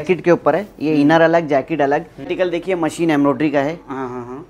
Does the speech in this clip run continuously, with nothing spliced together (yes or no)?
no